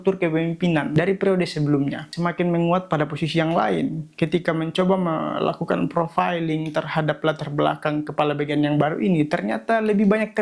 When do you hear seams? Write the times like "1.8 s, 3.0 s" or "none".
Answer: 0.9 s, 2.0 s